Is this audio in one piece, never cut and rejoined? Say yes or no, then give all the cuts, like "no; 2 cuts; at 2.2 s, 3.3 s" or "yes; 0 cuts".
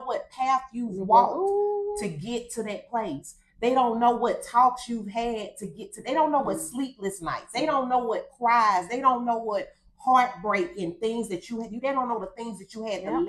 yes; 0 cuts